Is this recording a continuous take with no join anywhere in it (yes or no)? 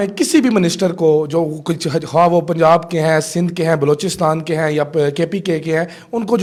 yes